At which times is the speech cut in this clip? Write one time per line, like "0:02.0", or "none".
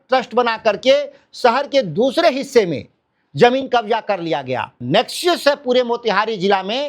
0:04.7